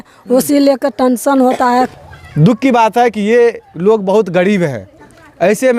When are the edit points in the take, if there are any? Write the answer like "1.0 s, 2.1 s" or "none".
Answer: 1.9 s